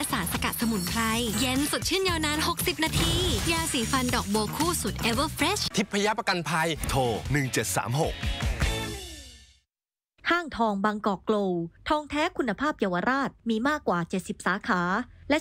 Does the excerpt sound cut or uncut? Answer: cut